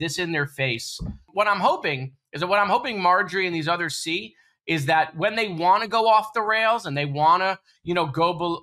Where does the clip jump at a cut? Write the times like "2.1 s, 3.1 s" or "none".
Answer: 1.3 s

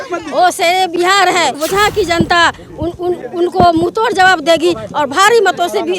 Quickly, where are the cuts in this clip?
1.6 s

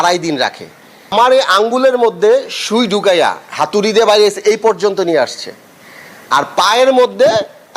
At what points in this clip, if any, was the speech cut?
1.1 s

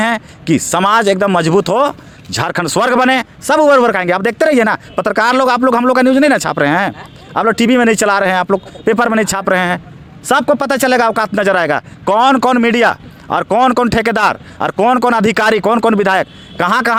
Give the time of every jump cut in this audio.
none

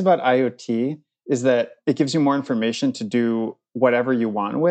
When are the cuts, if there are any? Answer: 1.7 s

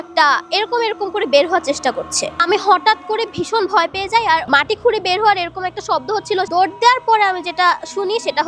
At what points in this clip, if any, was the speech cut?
4.5 s, 6.5 s

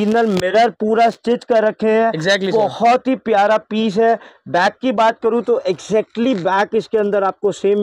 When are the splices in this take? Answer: none

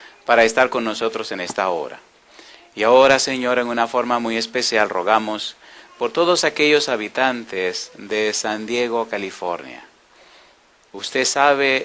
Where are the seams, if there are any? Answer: 10.0 s

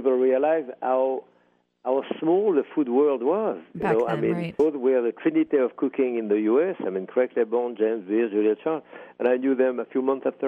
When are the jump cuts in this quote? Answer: none

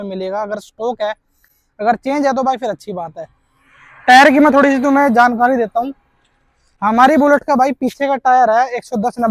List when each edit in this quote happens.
none

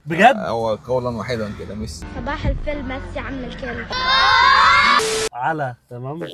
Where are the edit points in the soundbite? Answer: 1.9 s, 3.9 s, 5.3 s

